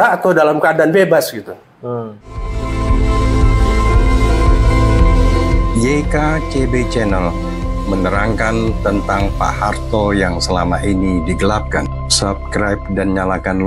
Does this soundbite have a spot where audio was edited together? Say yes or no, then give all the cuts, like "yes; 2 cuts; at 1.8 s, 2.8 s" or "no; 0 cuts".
yes; 1 cut; at 2.7 s